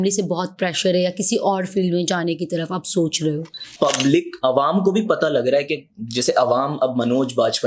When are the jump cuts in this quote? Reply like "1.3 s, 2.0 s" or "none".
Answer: 3.7 s